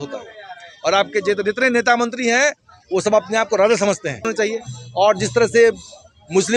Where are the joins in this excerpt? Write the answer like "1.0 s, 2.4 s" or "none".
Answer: 4.3 s